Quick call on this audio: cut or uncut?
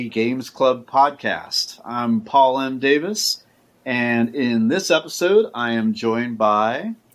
uncut